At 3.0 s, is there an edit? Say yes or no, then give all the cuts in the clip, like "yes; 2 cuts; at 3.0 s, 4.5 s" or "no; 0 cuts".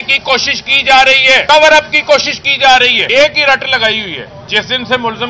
yes; 2 cuts; at 1.4 s, 3.0 s